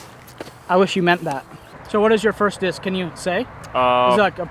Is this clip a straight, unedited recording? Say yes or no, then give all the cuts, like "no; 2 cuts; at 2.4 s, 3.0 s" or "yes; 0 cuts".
no; 1 cut; at 1.8 s